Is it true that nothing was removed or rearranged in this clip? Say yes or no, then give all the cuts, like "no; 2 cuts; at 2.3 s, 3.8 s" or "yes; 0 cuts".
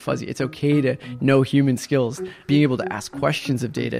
no; 1 cut; at 2.3 s